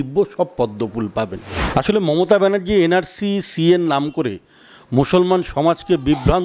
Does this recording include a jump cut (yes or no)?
yes